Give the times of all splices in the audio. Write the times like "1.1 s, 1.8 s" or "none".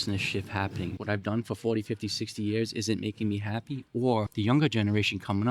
0.9 s, 4.3 s